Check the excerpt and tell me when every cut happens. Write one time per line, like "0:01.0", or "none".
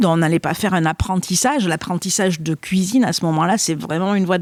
none